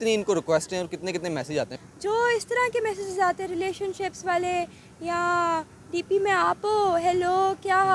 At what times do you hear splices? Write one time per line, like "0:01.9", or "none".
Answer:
0:01.8